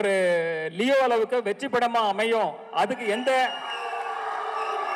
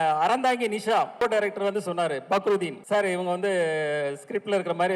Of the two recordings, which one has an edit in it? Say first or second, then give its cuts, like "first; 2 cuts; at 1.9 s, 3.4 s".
second; 2 cuts; at 1.2 s, 2.8 s